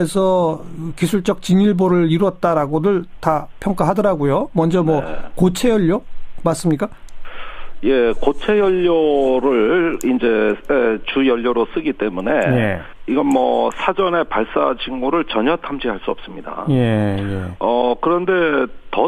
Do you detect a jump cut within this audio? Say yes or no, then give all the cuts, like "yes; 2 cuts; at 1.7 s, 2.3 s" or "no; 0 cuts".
no; 0 cuts